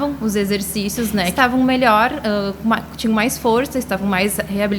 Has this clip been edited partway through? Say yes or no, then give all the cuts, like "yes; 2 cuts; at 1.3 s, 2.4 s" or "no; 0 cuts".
yes; 1 cut; at 1.3 s